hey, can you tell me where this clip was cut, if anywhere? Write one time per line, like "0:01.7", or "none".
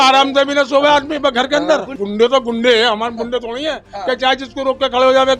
0:01.9